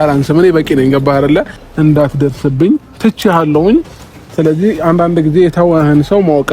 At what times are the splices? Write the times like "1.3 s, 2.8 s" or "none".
1.6 s